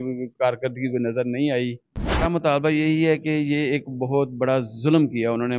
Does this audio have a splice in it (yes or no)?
yes